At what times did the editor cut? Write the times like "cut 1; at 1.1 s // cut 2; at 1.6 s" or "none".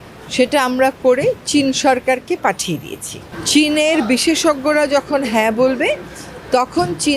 cut 1; at 3.3 s

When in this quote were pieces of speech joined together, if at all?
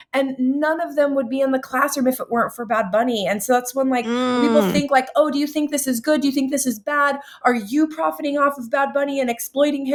none

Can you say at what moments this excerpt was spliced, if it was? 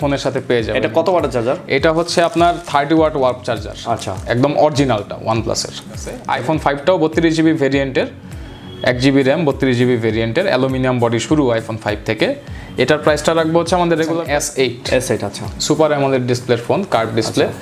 cut 1; at 6.1 s // cut 2; at 14.2 s

